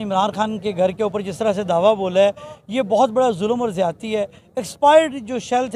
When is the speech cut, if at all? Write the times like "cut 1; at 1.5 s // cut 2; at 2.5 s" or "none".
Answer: none